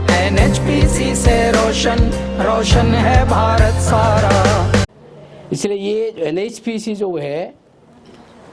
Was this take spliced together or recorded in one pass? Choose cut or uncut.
cut